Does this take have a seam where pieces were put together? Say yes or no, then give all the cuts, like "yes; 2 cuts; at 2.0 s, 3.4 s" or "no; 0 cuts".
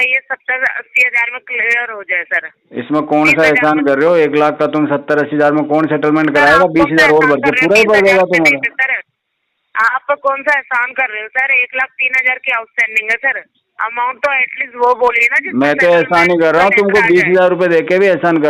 no; 0 cuts